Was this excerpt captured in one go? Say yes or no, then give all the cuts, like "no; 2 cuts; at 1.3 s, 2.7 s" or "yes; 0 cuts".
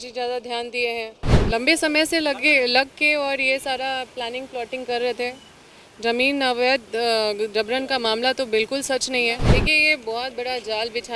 no; 2 cuts; at 1.3 s, 9.4 s